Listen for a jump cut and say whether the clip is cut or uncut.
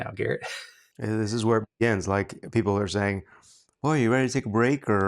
cut